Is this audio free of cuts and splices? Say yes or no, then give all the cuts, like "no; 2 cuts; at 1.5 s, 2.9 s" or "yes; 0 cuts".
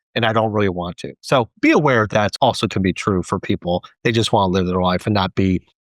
no; 1 cut; at 2.2 s